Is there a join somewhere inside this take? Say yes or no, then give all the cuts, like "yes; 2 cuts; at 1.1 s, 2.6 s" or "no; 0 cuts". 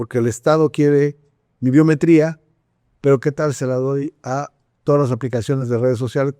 no; 0 cuts